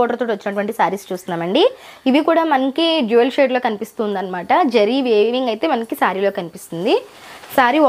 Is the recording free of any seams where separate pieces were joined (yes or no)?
yes